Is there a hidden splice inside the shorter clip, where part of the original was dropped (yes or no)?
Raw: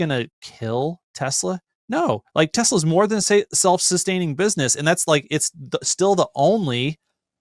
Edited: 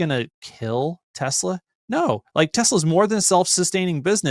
yes